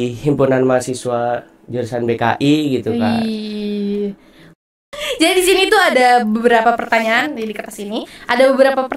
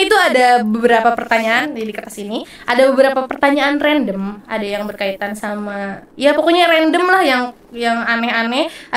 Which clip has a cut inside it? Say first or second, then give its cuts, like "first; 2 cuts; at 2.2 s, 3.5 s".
first; 1 cut; at 4.6 s